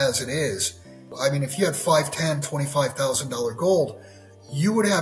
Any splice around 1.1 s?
yes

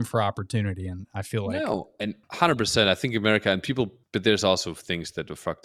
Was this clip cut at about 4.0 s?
yes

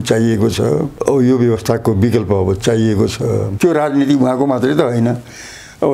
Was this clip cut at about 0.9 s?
yes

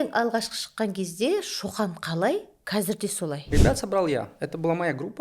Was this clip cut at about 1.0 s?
no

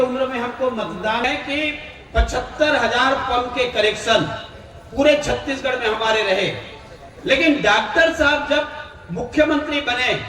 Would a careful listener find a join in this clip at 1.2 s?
yes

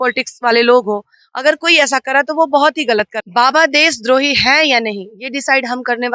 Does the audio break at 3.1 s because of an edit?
yes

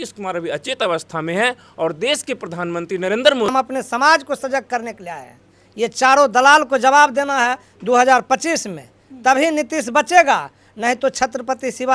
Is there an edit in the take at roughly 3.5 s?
yes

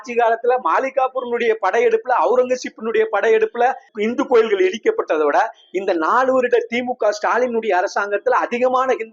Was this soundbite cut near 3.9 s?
yes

